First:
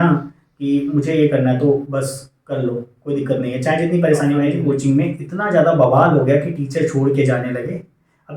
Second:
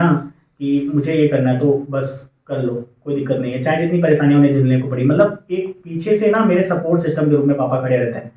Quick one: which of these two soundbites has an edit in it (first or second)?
first